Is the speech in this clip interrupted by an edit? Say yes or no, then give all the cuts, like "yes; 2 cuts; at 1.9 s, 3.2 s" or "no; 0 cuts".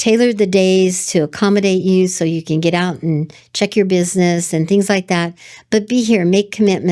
no; 0 cuts